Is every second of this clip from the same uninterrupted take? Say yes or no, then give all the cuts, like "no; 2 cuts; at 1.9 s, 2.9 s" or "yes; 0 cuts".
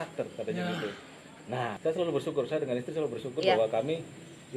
no; 1 cut; at 1.7 s